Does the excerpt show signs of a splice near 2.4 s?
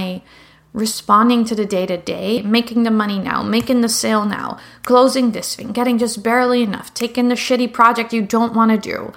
yes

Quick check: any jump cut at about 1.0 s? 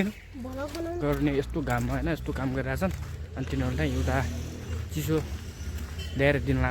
yes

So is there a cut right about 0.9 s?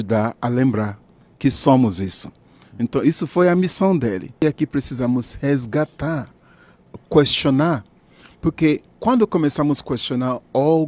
no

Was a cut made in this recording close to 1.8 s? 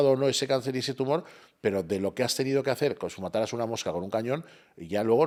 no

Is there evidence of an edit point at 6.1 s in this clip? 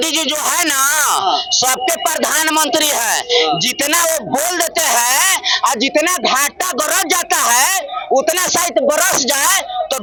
no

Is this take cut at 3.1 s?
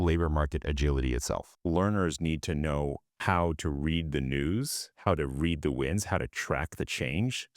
yes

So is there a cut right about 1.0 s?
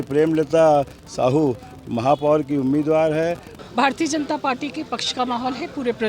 no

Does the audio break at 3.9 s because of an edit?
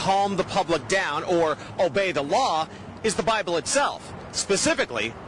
yes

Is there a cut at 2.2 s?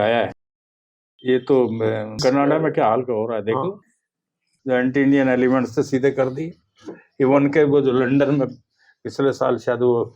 yes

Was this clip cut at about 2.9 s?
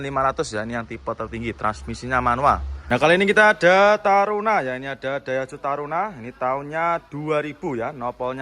yes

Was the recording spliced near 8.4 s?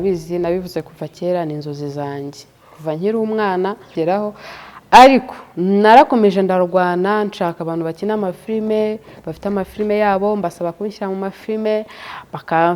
no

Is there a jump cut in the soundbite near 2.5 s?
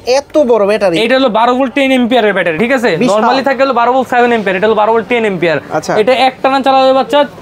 no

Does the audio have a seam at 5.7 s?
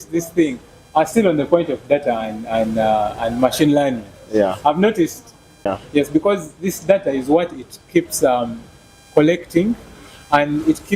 yes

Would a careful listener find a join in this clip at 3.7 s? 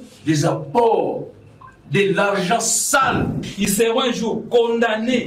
yes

